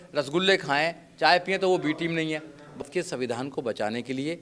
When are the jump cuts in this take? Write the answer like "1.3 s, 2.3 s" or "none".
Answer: 2.8 s